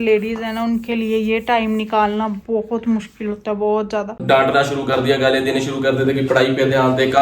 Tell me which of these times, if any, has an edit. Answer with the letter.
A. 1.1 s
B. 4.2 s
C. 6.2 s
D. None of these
B